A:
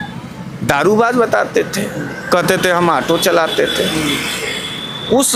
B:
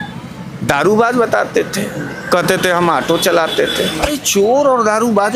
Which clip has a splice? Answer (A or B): B